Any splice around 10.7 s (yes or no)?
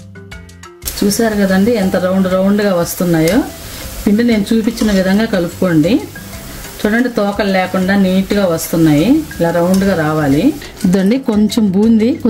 yes